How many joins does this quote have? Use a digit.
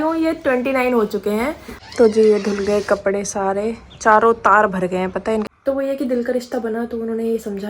2